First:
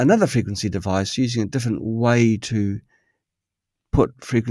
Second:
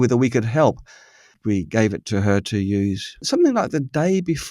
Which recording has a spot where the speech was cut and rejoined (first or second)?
second